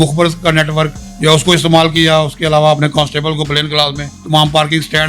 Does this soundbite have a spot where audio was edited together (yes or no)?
yes